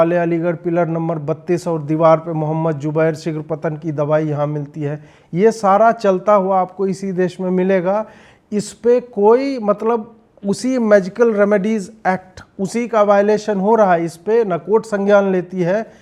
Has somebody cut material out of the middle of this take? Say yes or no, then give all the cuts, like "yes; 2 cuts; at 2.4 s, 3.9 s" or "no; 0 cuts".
no; 0 cuts